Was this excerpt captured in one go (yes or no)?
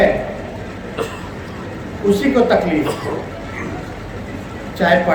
yes